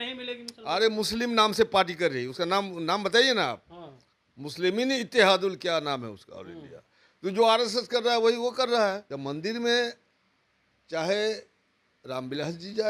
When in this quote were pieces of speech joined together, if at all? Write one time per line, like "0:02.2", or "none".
0:09.1